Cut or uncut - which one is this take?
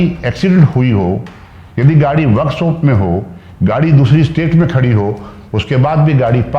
uncut